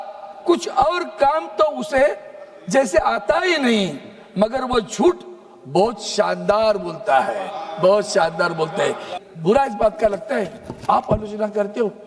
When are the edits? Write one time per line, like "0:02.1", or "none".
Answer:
0:09.1